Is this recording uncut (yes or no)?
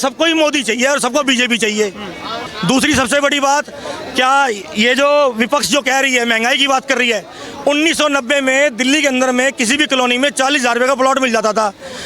no